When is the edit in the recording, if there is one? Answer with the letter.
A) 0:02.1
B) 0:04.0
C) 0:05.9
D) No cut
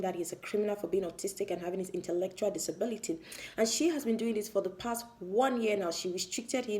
D